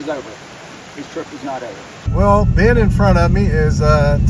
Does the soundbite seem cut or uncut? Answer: cut